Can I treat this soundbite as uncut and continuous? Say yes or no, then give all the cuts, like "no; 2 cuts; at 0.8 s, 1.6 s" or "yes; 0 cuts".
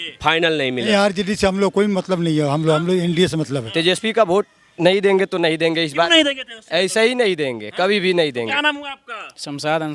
no; 3 cuts; at 0.9 s, 3.6 s, 8.6 s